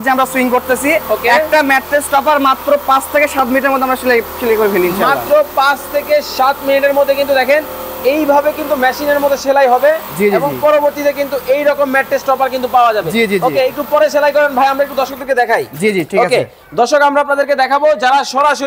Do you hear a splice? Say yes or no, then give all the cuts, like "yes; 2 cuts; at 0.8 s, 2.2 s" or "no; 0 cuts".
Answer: no; 0 cuts